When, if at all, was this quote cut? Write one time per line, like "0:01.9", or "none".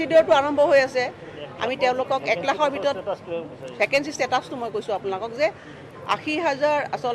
0:05.0